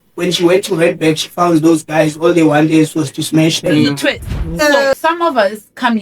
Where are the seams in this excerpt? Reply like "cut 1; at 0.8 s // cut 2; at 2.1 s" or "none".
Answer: cut 1; at 4.9 s